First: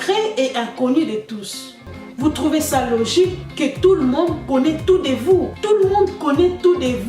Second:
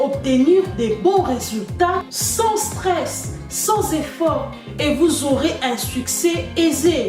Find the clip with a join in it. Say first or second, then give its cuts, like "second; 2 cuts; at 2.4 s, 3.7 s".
first; 1 cut; at 1.9 s